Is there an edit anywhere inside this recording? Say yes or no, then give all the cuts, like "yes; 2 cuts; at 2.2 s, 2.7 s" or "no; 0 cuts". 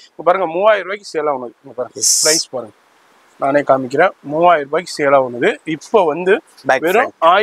no; 0 cuts